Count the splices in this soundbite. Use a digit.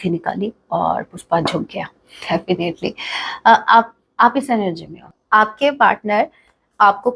1